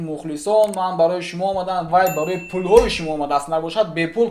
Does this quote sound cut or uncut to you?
uncut